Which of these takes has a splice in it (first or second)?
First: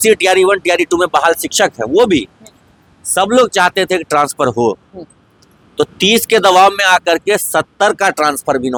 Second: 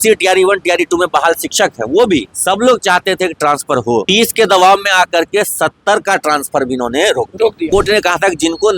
second